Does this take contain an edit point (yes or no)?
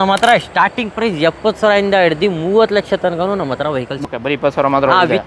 yes